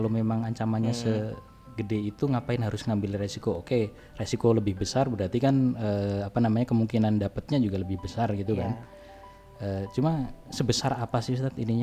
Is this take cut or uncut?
uncut